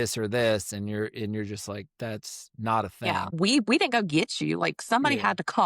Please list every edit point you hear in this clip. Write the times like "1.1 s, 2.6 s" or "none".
3.2 s